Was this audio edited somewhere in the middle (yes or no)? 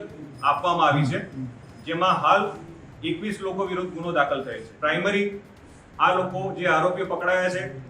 yes